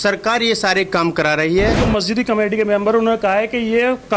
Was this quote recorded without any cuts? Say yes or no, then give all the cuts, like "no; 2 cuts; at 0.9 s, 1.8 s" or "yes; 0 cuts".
no; 1 cut; at 1.8 s